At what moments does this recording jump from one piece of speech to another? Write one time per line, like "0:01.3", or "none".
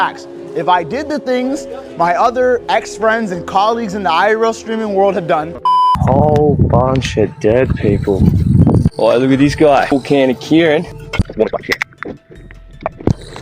0:05.9
0:09.9
0:11.0